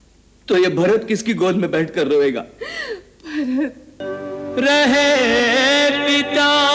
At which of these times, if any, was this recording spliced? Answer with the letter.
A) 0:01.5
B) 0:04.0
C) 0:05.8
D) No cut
B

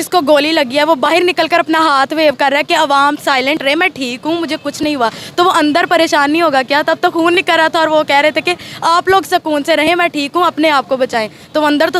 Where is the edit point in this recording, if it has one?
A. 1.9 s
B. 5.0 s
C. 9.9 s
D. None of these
D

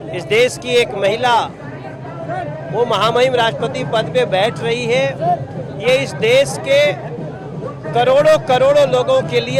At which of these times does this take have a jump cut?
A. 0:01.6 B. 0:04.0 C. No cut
C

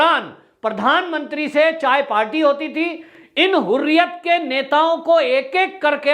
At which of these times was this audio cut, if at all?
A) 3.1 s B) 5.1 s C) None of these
A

